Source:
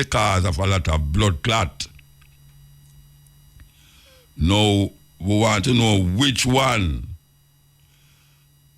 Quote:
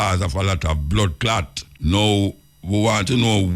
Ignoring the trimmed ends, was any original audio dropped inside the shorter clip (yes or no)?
yes